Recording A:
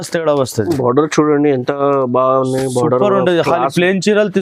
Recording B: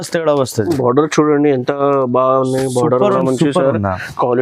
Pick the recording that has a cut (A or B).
B